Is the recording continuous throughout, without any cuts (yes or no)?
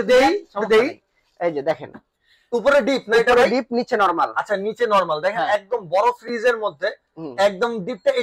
yes